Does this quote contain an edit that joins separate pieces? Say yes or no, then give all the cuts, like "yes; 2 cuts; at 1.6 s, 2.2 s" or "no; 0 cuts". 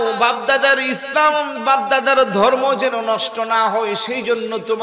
no; 0 cuts